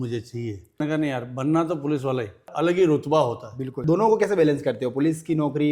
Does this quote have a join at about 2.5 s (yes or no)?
yes